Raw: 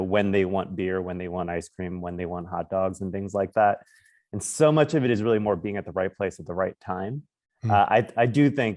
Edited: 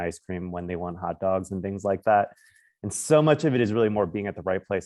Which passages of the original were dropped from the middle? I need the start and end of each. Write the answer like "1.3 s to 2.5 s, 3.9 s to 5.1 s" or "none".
none